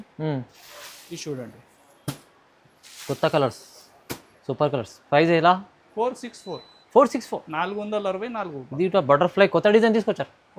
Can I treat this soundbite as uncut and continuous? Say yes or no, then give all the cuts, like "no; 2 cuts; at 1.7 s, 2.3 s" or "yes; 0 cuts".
yes; 0 cuts